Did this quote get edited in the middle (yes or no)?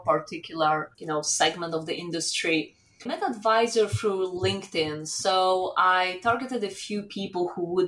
yes